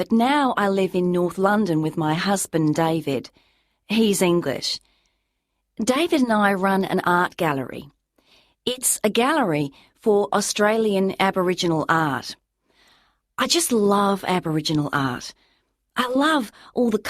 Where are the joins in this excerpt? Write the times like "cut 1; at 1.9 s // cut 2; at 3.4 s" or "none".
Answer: cut 1; at 8.9 s

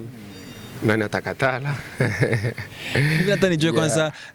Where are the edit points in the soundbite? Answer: none

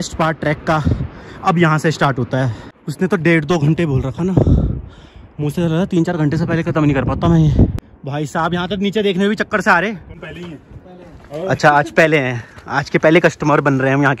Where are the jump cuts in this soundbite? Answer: cut 1; at 2.6 s // cut 2; at 7.8 s // cut 3; at 10.1 s

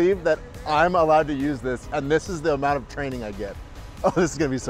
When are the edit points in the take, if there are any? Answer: none

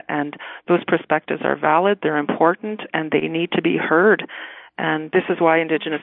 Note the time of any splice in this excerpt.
cut 1; at 5.0 s

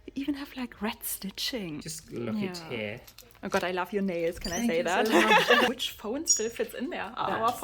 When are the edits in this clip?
cut 1; at 1.9 s // cut 2; at 5.7 s

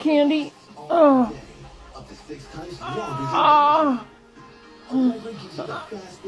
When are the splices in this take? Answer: none

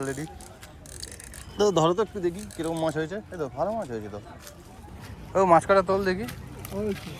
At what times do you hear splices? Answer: cut 1; at 4.8 s

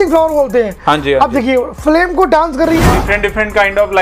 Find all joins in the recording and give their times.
cut 1; at 3.0 s

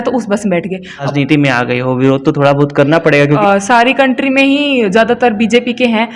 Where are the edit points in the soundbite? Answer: cut 1; at 1.1 s // cut 2; at 3.4 s

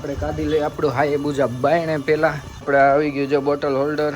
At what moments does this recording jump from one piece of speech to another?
cut 1; at 2.6 s

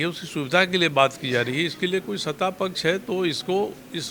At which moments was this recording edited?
none

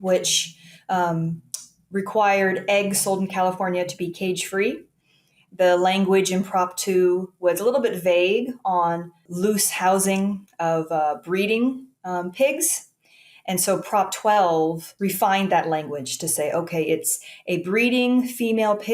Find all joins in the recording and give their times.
cut 1; at 9.2 s // cut 2; at 14.9 s

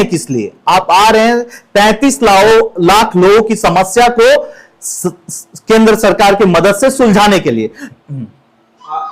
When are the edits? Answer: cut 1; at 7.8 s

